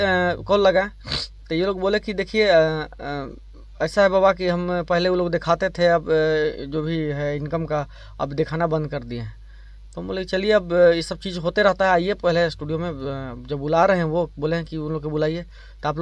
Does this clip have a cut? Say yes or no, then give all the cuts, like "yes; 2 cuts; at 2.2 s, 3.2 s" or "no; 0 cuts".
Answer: no; 0 cuts